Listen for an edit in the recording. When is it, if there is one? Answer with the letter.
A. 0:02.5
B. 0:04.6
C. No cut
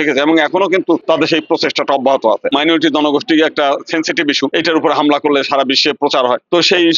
A